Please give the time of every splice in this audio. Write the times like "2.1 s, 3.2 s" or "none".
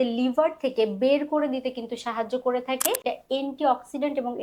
3.0 s